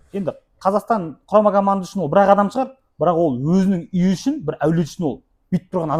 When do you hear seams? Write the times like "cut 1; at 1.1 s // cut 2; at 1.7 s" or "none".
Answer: none